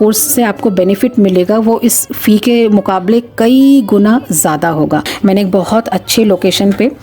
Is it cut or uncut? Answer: cut